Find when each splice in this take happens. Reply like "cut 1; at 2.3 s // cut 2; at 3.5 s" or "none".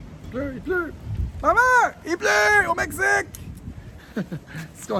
none